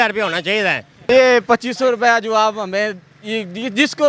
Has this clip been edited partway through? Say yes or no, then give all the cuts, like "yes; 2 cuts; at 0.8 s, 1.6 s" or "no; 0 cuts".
yes; 1 cut; at 1.1 s